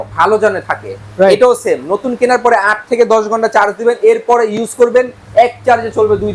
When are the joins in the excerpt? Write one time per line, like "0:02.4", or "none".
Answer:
none